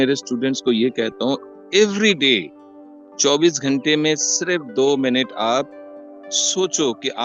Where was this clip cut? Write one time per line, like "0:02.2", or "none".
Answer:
none